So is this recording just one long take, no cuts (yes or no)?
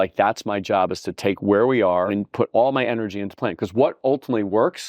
no